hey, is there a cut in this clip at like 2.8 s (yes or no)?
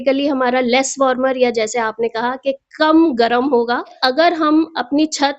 no